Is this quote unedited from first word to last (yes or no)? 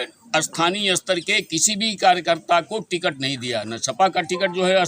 yes